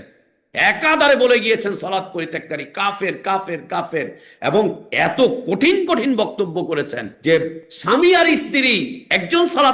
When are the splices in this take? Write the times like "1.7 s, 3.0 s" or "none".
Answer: 4.8 s, 7.0 s, 7.7 s